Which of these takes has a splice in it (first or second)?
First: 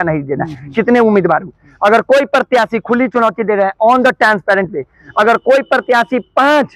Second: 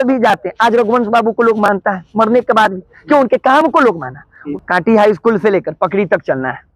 second